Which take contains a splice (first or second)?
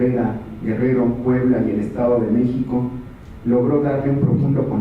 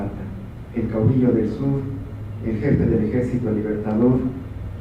first